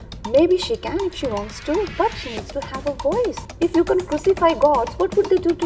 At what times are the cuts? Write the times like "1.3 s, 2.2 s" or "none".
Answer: 3.4 s